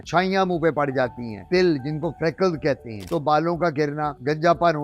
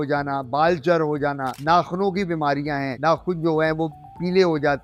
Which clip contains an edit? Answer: first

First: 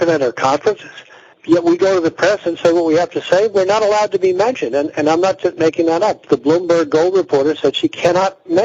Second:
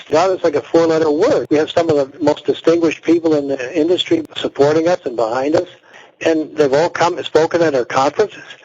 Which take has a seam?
second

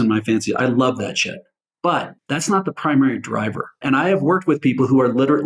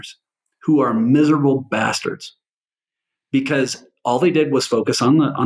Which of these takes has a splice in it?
first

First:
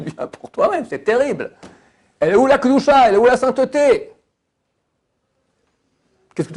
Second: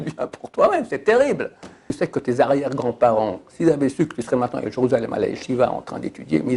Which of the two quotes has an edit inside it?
second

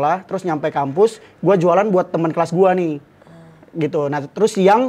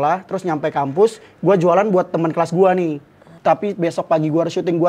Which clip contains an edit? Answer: second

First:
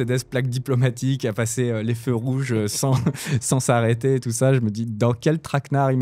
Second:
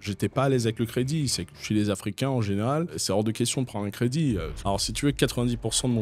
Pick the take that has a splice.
second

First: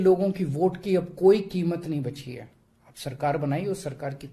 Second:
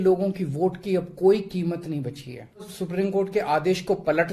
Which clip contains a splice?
second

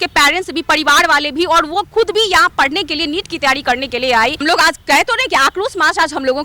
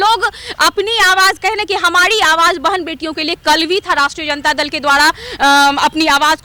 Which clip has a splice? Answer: first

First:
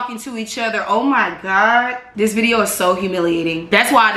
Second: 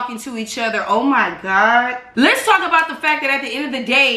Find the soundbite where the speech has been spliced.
second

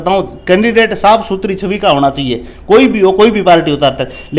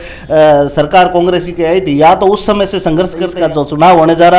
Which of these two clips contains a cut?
second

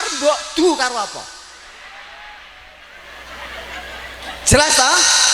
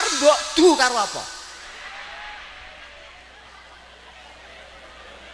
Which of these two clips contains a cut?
first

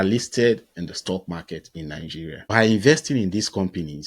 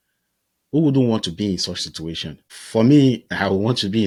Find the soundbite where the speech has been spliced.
first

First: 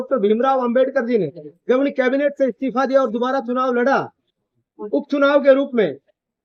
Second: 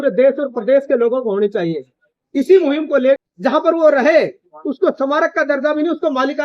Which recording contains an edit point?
second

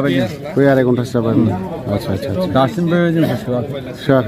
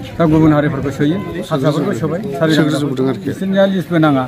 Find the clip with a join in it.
second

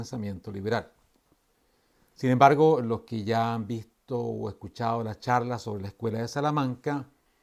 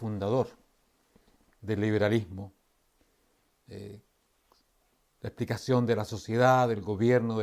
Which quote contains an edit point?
second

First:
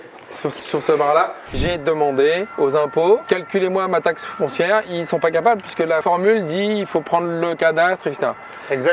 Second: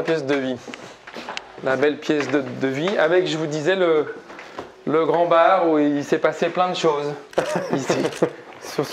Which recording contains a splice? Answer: first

